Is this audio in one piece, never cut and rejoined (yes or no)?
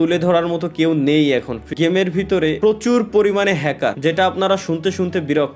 no